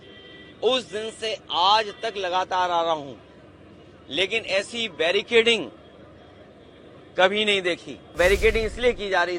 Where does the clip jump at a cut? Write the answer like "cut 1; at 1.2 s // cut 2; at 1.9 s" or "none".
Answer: cut 1; at 8.1 s